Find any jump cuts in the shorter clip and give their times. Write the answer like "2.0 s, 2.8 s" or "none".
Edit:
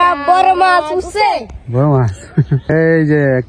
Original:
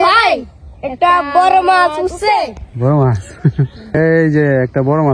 2.6 s